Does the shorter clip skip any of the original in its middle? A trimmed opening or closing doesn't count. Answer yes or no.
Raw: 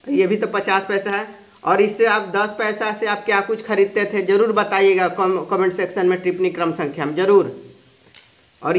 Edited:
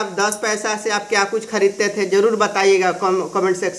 no